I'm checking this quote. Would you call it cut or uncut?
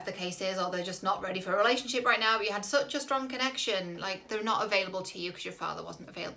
uncut